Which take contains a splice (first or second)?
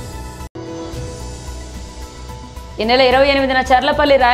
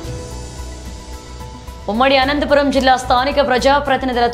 first